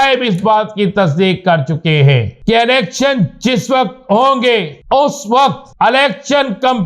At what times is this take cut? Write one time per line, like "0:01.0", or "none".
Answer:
0:02.3
0:04.8
0:05.6